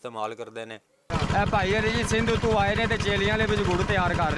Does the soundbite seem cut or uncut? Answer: cut